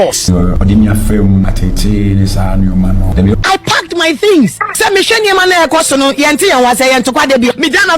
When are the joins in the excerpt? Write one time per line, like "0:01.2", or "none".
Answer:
0:03.3